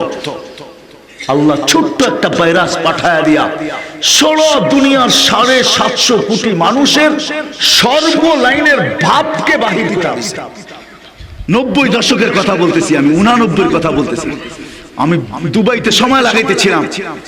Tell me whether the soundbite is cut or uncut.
cut